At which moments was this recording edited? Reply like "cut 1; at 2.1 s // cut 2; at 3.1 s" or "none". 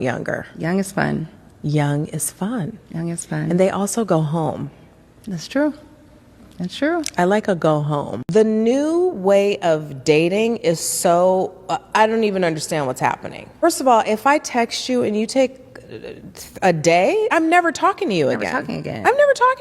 cut 1; at 8.0 s // cut 2; at 13.6 s // cut 3; at 17.3 s

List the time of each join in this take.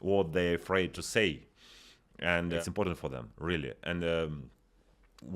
cut 1; at 1.0 s

